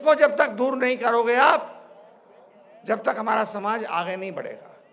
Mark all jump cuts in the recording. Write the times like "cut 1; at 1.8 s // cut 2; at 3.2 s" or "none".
none